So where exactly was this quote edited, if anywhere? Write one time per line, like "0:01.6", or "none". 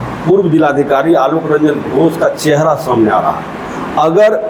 none